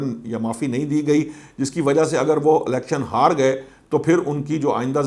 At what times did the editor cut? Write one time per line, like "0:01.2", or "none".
none